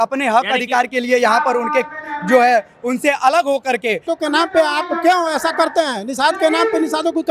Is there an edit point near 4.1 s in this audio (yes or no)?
yes